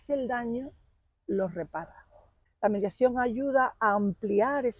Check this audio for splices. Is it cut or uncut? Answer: cut